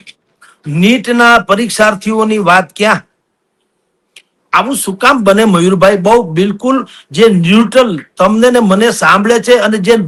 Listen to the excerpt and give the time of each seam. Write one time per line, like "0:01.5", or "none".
none